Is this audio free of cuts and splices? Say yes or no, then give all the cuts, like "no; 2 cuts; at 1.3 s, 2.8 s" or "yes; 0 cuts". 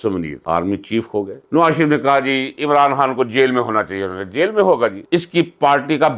no; 1 cut; at 1.4 s